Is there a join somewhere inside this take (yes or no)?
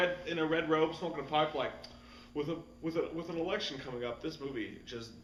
no